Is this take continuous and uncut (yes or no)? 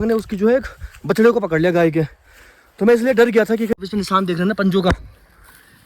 no